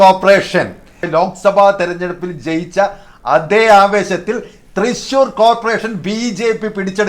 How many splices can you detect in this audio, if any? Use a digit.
1